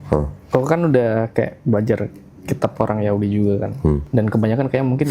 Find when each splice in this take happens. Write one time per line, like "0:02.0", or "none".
0:04.0